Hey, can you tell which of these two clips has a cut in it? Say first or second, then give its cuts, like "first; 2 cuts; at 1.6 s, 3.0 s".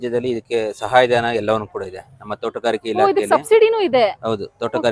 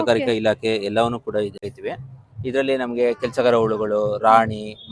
second; 1 cut; at 1.7 s